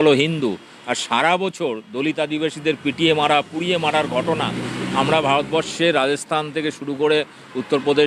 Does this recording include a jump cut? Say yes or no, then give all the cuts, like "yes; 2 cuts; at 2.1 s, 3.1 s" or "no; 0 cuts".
no; 0 cuts